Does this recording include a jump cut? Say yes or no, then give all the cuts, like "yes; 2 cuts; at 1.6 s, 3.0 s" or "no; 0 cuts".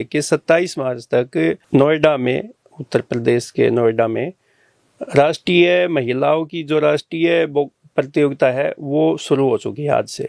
no; 0 cuts